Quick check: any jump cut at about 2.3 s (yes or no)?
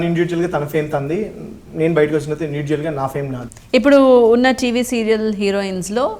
no